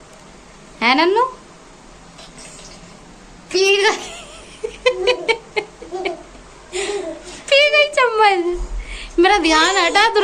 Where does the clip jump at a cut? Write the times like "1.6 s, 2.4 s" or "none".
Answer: none

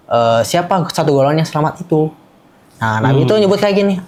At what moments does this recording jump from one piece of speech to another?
none

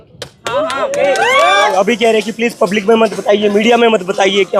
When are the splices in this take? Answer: 1.7 s

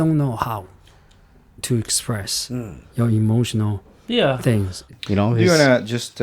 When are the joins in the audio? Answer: 4.9 s

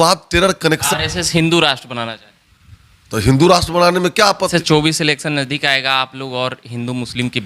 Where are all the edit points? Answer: 0.8 s, 4.5 s

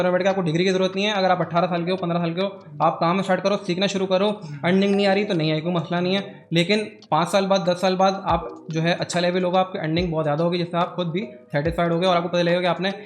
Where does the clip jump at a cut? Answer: none

